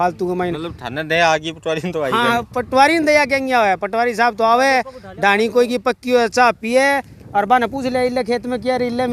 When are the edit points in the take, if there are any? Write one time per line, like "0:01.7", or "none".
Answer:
none